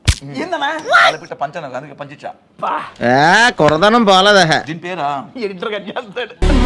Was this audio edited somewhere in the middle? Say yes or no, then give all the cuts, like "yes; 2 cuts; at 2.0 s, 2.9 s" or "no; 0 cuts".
no; 0 cuts